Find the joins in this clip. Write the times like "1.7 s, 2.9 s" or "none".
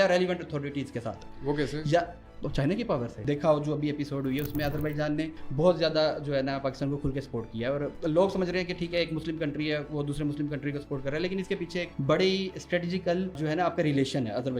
3.2 s, 5.4 s, 7.9 s, 11.9 s, 13.4 s